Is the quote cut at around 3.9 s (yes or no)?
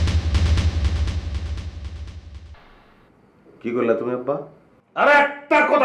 no